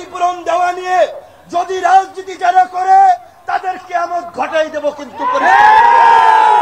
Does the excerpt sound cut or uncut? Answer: uncut